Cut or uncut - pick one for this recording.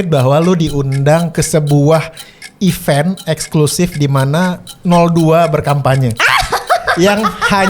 uncut